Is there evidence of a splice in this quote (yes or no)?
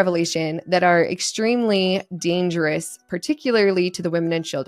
no